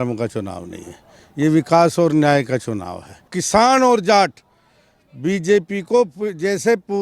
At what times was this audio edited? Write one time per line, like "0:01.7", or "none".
0:03.3